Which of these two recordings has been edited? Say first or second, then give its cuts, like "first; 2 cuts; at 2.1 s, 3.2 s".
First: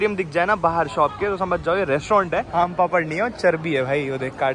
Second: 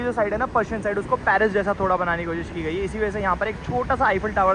first; 1 cut; at 2.5 s